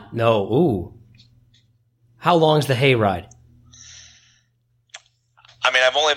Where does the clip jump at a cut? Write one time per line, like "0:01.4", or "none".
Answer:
none